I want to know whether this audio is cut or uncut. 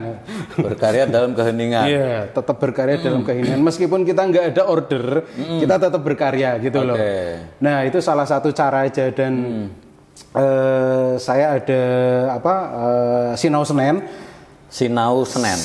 uncut